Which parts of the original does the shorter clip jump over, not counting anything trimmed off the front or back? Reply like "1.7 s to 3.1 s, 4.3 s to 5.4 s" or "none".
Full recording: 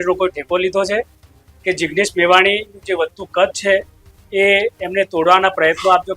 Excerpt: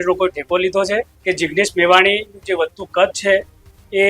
1.1 s to 1.5 s